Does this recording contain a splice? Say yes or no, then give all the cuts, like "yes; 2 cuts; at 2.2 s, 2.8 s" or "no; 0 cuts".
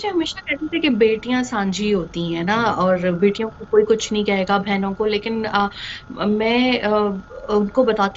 no; 0 cuts